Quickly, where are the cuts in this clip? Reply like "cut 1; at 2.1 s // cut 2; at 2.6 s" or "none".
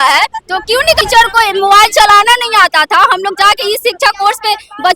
cut 1; at 1.0 s